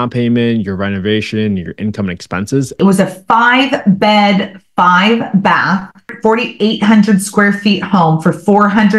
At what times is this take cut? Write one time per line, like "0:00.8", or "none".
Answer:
0:02.8
0:06.1